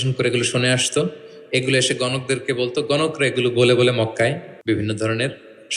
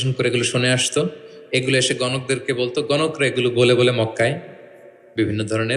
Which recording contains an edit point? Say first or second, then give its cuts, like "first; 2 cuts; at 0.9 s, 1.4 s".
first; 1 cut; at 4.5 s